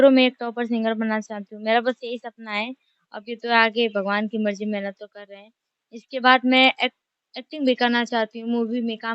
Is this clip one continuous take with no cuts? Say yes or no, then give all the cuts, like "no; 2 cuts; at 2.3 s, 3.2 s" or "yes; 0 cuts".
yes; 0 cuts